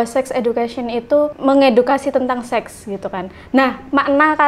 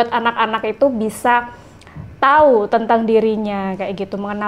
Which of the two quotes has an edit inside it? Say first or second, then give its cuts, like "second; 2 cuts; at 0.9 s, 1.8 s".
first; 1 cut; at 1.3 s